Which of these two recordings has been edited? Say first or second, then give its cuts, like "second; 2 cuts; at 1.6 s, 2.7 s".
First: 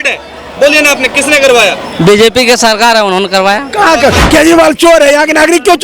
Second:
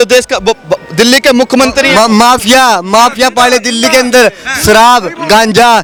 first; 1 cut; at 4.2 s